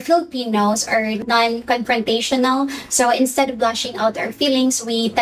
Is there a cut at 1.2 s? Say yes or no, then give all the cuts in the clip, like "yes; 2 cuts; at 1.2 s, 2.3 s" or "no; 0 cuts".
yes; 1 cut; at 1.2 s